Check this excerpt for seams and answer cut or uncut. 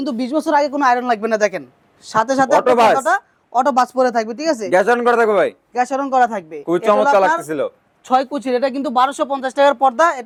uncut